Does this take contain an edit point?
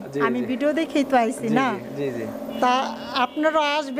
no; 0 cuts

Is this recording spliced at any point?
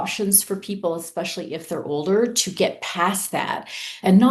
no; 0 cuts

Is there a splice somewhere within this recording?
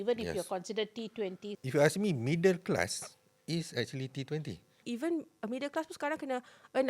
yes; 2 cuts; at 1.5 s, 4.8 s

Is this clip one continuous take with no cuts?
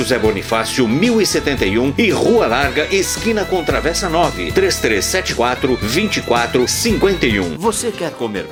yes; 0 cuts

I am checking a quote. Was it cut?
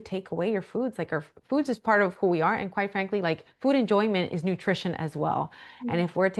no; 0 cuts

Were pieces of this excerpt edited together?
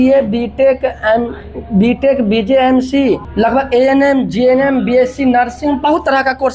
yes; 1 cut; at 3.3 s

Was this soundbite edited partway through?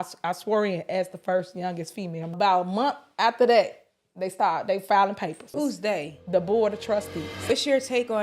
yes; 3 cuts; at 2.3 s, 5.5 s, 7.5 s

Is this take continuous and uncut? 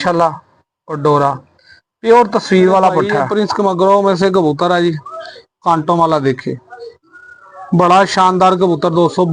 no; 1 cut; at 3.3 s

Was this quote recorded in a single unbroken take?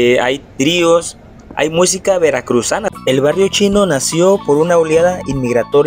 no; 1 cut; at 2.9 s

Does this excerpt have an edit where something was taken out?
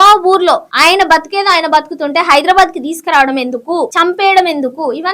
yes; 1 cut; at 3.9 s

